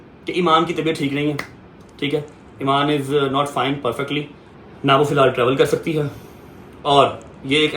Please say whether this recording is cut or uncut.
uncut